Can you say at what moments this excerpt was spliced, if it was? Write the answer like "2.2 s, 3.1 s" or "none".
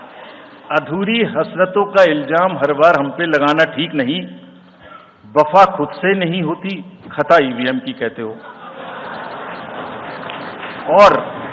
none